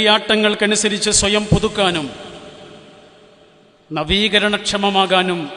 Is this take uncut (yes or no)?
yes